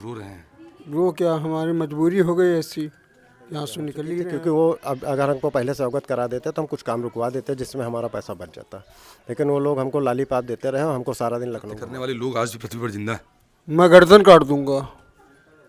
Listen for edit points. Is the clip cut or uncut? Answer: cut